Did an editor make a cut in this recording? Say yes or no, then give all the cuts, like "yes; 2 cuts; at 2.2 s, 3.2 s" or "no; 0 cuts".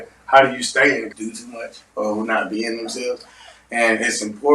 yes; 1 cut; at 1.1 s